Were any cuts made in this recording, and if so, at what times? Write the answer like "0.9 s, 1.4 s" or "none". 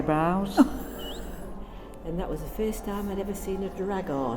1.6 s